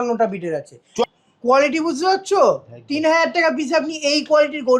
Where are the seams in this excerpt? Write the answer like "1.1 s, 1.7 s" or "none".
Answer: 1.0 s